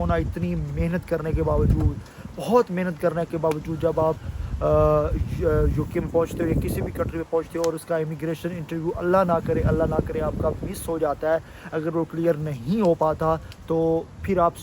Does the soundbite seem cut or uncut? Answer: uncut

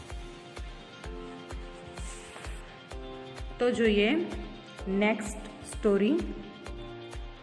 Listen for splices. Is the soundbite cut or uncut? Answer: uncut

